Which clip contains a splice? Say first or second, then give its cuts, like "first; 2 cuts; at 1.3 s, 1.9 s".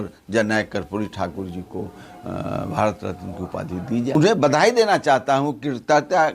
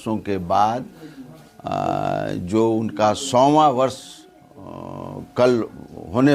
first; 1 cut; at 4.2 s